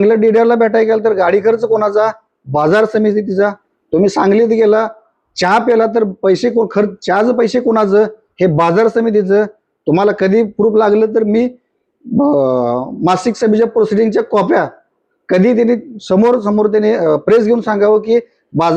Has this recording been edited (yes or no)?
no